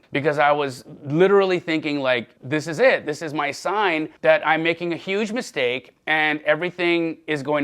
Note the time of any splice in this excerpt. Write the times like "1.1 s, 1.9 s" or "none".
4.1 s